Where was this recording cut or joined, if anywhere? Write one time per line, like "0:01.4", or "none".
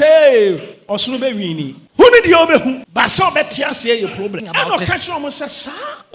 0:01.8
0:02.8
0:04.5

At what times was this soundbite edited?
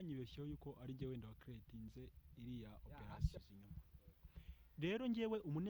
0:03.4

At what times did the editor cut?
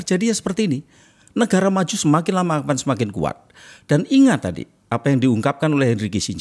none

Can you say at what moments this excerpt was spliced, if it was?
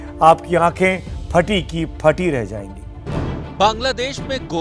0:03.1

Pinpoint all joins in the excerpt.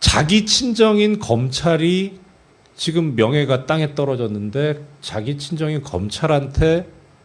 none

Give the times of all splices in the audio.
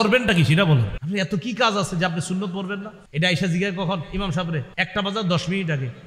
0:00.9
0:03.0
0:04.8

